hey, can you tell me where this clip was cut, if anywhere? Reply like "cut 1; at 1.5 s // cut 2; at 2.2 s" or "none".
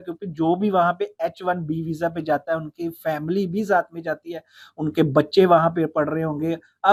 none